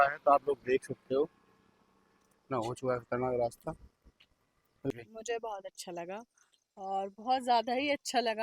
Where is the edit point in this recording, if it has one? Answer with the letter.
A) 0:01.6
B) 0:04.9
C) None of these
B